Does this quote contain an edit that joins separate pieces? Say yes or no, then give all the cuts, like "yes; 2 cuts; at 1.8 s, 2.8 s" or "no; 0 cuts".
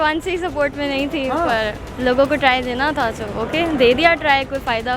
no; 0 cuts